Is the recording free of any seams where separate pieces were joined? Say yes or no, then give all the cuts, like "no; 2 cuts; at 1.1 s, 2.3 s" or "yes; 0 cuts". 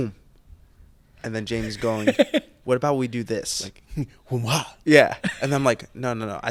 yes; 0 cuts